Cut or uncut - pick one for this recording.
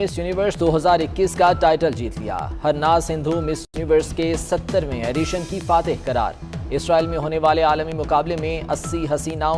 uncut